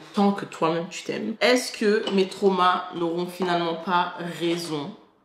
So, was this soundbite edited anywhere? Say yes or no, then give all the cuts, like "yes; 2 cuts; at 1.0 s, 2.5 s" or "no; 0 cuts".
yes; 1 cut; at 1.4 s